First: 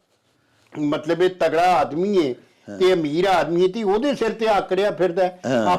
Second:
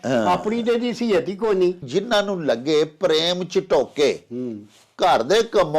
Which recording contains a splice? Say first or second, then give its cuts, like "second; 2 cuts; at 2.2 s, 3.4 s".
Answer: second; 1 cut; at 1.8 s